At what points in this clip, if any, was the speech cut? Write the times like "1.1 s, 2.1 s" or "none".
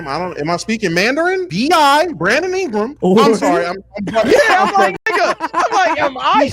1.5 s, 2.9 s